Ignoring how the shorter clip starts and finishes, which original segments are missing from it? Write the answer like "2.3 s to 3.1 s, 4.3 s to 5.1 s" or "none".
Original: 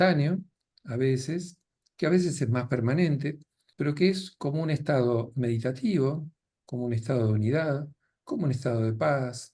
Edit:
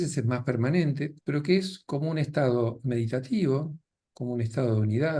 3.4 s to 3.7 s